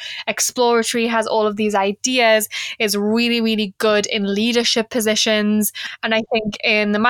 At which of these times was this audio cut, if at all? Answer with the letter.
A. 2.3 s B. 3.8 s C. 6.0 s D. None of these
C